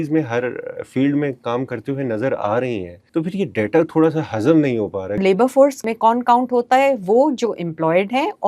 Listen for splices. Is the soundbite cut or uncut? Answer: cut